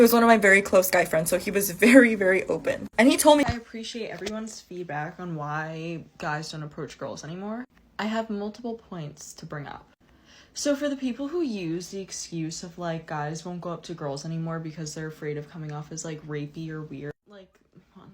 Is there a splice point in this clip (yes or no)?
yes